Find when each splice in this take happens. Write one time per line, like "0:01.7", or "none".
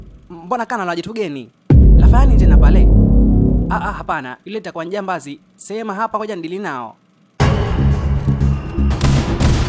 0:07.2